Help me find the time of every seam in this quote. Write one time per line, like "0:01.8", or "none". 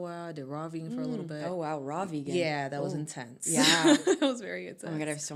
none

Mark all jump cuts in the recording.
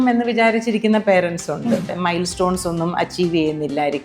0:01.9

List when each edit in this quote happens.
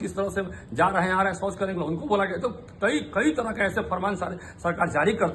none

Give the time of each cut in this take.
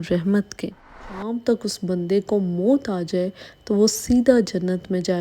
0:01.0

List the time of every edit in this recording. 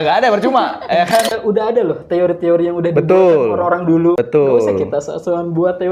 0:01.4
0:04.2

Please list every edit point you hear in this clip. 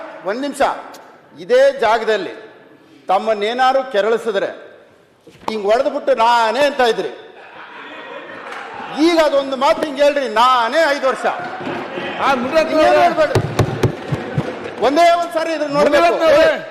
none

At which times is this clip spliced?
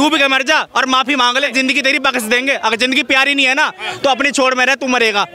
0:01.1

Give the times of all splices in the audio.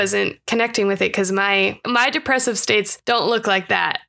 none

